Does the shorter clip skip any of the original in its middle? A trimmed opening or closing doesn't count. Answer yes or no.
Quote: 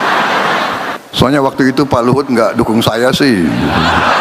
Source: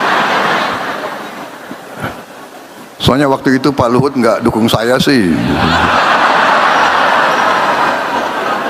yes